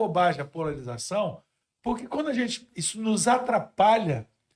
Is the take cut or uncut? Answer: uncut